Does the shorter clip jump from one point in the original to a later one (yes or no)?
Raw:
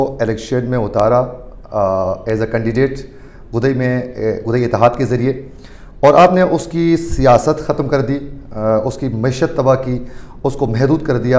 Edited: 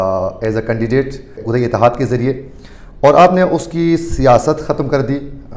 yes